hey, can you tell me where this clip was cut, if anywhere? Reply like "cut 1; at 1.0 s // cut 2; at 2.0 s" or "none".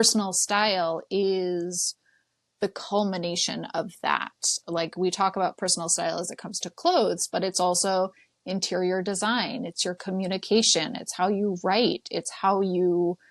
none